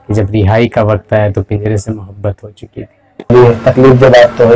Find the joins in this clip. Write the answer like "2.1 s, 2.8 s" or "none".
3.1 s